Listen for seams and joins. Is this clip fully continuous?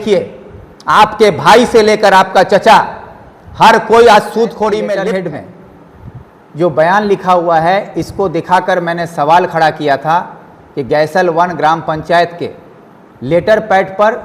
no; 1 cut; at 5.0 s

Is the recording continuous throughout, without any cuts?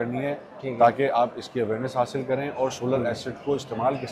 yes; 0 cuts

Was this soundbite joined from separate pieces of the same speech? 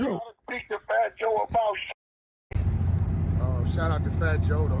yes; 1 cut; at 2.6 s

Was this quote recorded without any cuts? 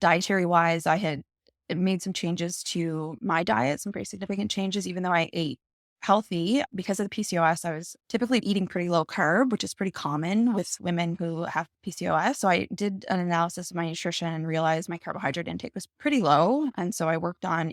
yes; 0 cuts

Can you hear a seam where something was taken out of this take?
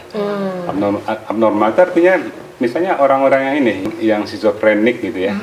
yes; 1 cut; at 3.9 s

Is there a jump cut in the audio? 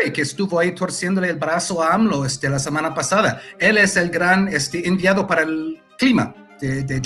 no; 0 cuts

